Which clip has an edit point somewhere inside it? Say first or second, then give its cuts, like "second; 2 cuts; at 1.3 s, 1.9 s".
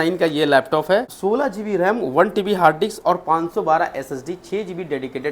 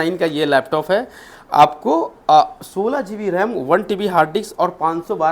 first; 1 cut; at 1.1 s